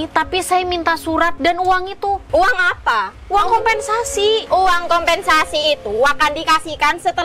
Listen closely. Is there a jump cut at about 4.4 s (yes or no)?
yes